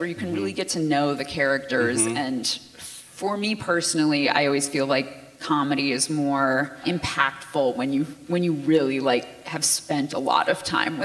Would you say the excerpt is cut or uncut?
cut